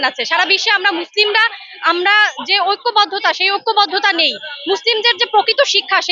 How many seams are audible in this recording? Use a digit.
0